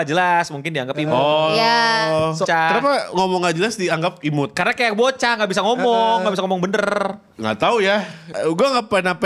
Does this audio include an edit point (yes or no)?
yes